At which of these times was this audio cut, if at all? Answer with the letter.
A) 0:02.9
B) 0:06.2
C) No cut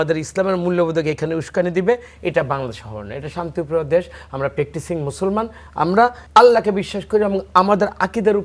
B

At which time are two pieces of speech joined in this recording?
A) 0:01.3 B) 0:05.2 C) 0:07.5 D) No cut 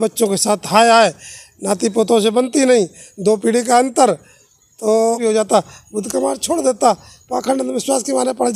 B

